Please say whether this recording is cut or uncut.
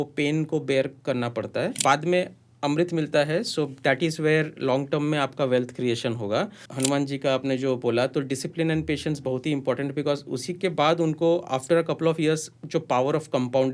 cut